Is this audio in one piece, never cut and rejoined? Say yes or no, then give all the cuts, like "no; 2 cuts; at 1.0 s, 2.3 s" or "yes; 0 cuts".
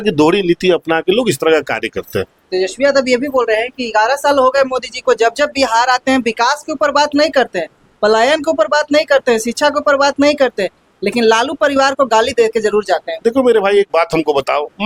yes; 0 cuts